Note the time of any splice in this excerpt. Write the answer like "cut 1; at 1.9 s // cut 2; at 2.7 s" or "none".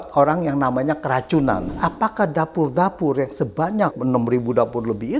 cut 1; at 1.7 s // cut 2; at 3.9 s